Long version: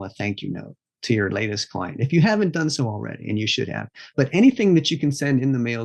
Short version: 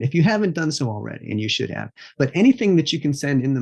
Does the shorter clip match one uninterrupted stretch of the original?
yes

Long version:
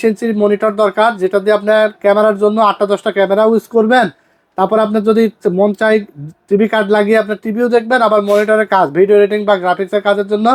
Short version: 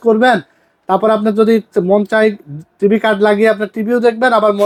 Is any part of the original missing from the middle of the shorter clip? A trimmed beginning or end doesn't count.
no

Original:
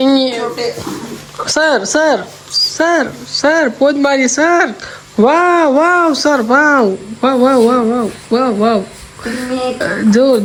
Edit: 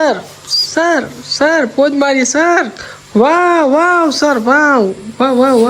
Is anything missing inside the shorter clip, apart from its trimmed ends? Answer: no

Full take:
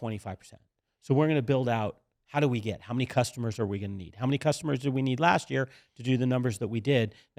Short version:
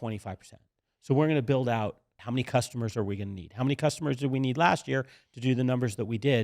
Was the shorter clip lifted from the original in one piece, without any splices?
no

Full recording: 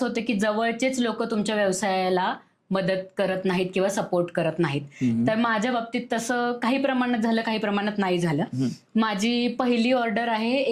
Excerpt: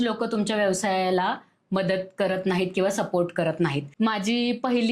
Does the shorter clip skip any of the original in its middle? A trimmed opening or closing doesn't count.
yes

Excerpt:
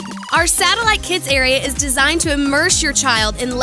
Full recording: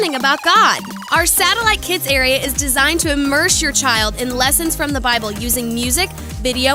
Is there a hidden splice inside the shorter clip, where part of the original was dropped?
no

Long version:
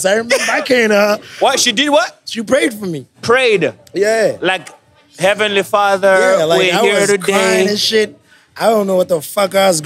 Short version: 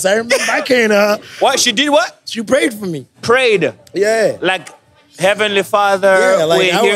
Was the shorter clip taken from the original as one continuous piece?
yes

